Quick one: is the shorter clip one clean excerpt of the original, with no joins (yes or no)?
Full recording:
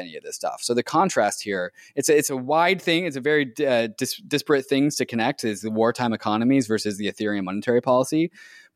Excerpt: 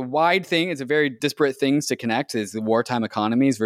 no